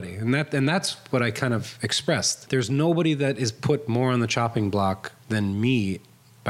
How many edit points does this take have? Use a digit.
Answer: 2